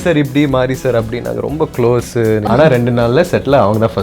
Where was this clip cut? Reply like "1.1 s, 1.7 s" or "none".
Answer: 2.4 s